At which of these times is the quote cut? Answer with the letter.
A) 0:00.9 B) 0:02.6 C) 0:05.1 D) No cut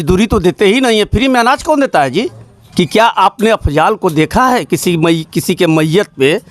B